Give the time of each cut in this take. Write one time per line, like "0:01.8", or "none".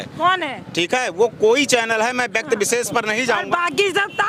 none